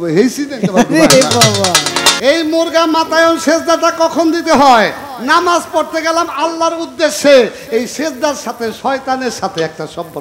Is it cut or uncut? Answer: cut